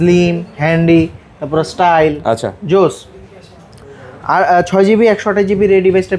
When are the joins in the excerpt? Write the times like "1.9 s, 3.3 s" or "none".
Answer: none